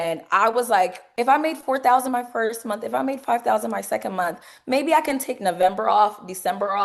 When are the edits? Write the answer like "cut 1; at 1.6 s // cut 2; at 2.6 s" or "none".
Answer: cut 1; at 1.0 s